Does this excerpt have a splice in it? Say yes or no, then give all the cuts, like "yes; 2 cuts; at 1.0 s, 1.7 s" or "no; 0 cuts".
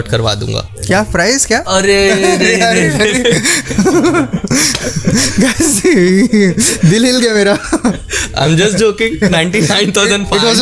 no; 0 cuts